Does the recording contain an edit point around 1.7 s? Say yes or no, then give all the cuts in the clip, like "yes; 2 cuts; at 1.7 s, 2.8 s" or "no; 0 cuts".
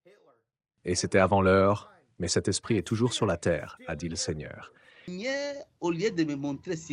no; 1 cut; at 5.1 s